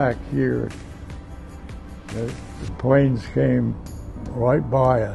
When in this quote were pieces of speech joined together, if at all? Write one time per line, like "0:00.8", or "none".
none